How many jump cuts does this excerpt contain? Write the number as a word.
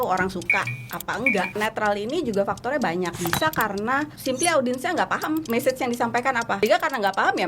five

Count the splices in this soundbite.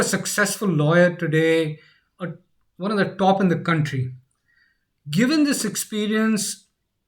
zero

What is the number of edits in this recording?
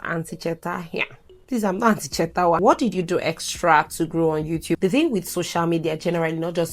two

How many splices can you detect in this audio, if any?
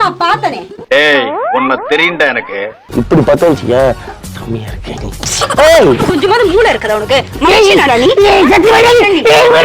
one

